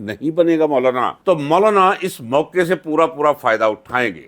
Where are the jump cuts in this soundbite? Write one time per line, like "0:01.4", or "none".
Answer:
0:01.2